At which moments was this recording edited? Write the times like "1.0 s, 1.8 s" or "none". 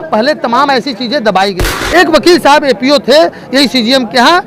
1.7 s